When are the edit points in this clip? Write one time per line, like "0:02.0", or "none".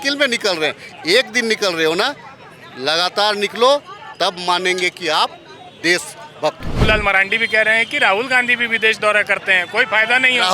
0:06.8